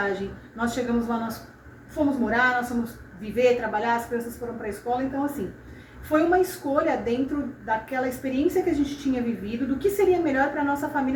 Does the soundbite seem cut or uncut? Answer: uncut